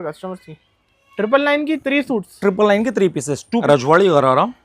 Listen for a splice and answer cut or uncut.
cut